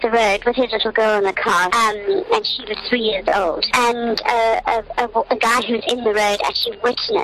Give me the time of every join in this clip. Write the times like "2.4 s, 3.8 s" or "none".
3.6 s